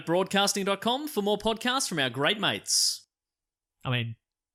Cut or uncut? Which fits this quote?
uncut